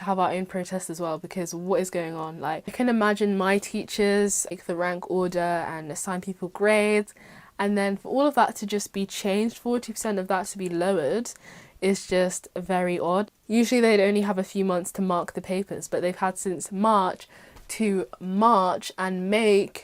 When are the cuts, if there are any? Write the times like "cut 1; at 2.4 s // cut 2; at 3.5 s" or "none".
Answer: cut 1; at 2.7 s // cut 2; at 4.5 s // cut 3; at 13.3 s